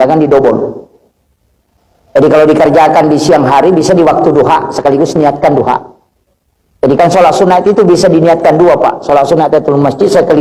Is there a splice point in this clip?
no; 0 cuts

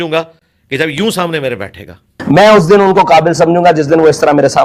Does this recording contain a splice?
yes; 1 cut; at 2.2 s

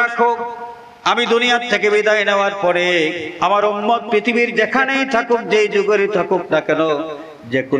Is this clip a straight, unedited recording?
yes; 0 cuts

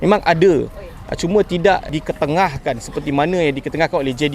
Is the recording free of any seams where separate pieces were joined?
no; 1 cut; at 1.9 s

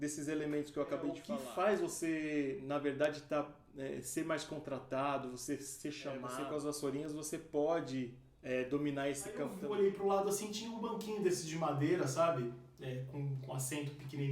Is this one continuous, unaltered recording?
no; 3 cuts; at 1.3 s, 6.3 s, 9.6 s

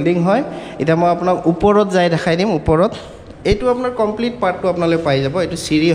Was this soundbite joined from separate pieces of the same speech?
no; 0 cuts

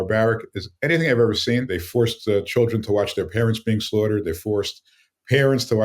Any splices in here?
yes; 1 cut; at 1.8 s

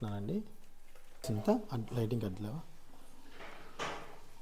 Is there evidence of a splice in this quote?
yes; 1 cut; at 1.3 s

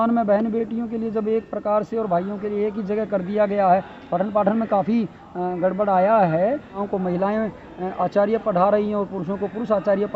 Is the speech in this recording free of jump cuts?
no; 1 cut; at 6.8 s

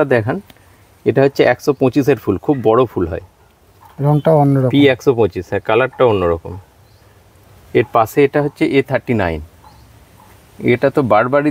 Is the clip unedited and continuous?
yes; 0 cuts

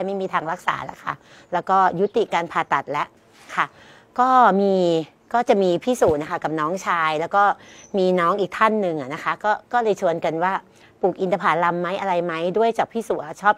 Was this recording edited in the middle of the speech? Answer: no; 0 cuts

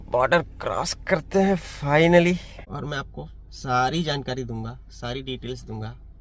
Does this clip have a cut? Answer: yes; 1 cut; at 2.6 s

